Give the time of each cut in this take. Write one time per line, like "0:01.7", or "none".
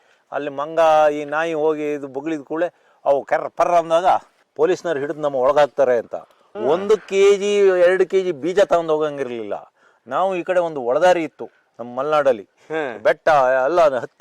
0:04.4
0:12.5